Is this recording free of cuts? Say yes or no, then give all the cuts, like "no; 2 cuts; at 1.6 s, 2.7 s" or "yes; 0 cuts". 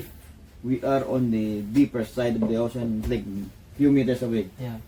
yes; 0 cuts